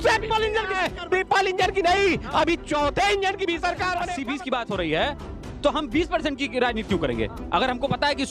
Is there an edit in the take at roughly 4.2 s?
yes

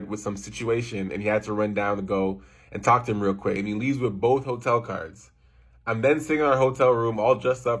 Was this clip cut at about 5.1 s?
no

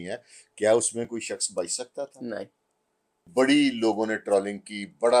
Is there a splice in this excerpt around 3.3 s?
yes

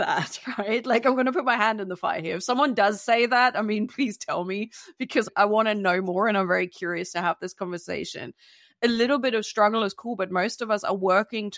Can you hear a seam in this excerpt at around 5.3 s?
yes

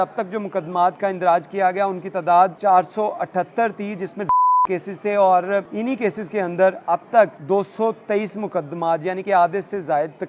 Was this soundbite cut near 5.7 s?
yes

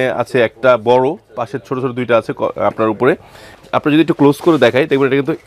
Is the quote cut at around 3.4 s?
yes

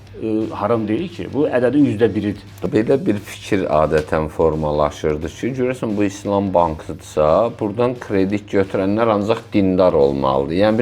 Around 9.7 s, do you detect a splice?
no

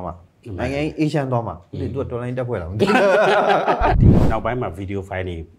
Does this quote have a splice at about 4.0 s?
yes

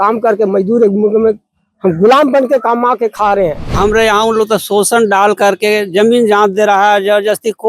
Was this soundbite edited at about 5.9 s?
no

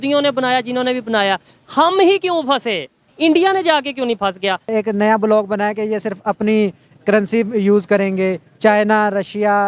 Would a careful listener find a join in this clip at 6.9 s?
no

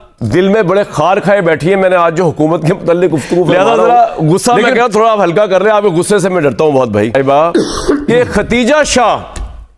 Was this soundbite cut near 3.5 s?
yes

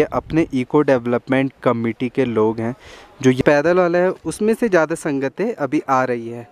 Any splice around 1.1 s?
no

